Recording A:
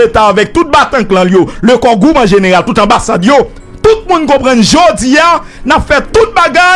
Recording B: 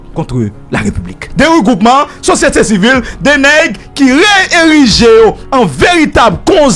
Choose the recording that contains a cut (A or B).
B